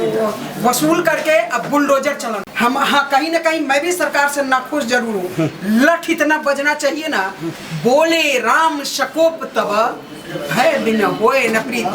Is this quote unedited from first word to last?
no; 1 cut; at 2.4 s

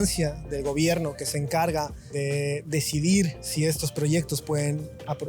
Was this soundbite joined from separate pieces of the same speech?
yes; 2 cuts; at 2.0 s, 3.4 s

